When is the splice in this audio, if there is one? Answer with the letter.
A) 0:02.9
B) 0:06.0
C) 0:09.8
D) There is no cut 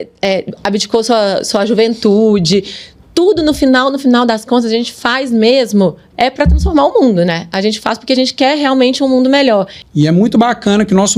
C